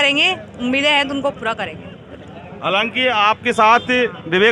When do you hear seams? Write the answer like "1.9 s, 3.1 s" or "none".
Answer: none